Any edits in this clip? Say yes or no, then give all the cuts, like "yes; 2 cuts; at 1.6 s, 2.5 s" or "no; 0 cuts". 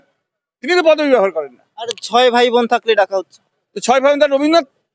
no; 0 cuts